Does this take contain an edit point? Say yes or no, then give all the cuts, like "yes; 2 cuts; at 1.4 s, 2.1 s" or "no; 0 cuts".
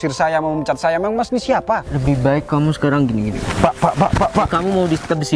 yes; 3 cuts; at 1.9 s, 3.4 s, 4.5 s